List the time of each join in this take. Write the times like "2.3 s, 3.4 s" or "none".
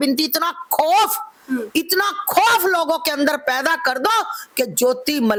none